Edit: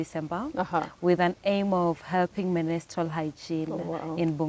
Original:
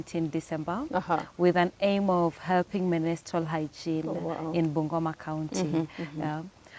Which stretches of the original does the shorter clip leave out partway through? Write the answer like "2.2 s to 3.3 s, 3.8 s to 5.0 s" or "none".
none